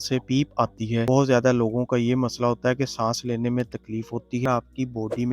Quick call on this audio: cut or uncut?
cut